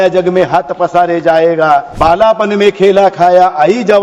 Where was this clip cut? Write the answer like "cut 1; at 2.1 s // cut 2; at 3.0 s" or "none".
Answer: cut 1; at 1.9 s